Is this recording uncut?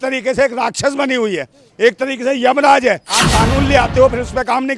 no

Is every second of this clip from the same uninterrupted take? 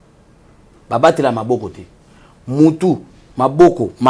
yes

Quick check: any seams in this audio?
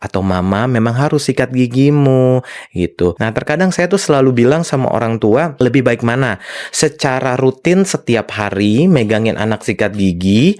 yes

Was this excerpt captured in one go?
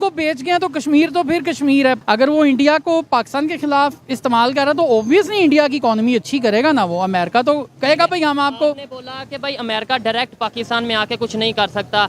no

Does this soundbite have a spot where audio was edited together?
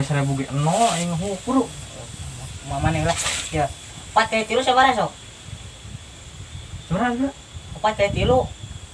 no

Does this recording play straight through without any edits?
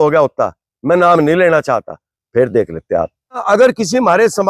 no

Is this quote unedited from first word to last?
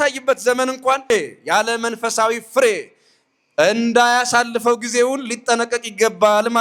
no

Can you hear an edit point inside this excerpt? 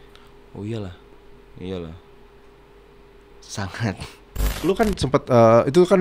yes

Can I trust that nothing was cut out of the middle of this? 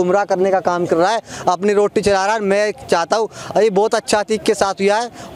yes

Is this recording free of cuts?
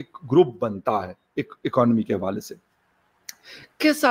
yes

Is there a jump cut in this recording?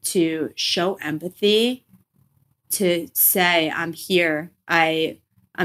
yes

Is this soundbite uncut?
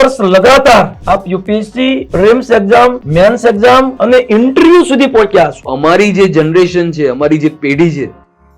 no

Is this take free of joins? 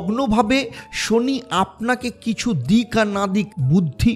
yes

